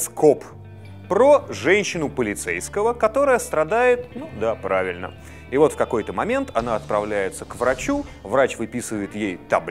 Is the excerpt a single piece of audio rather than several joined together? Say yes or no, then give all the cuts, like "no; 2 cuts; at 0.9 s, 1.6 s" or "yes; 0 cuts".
no; 1 cut; at 3.5 s